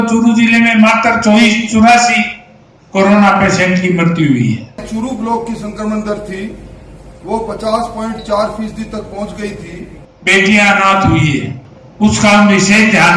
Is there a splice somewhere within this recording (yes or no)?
yes